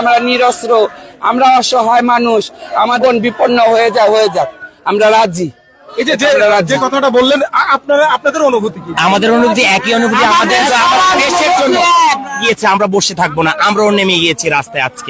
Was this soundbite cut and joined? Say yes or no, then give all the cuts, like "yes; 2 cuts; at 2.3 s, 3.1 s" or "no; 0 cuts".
no; 0 cuts